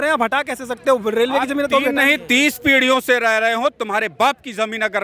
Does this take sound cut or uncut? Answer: uncut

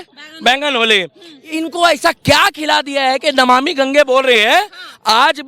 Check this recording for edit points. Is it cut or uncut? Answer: uncut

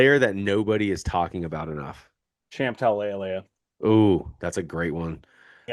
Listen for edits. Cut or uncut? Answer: uncut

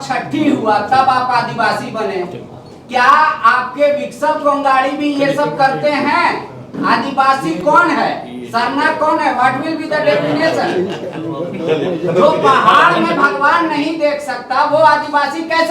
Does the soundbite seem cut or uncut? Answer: uncut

